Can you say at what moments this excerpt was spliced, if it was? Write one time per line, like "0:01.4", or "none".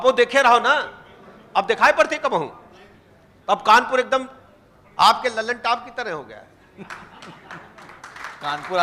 none